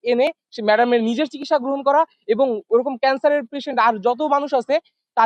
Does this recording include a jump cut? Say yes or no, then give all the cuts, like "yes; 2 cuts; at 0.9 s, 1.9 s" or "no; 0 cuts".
no; 0 cuts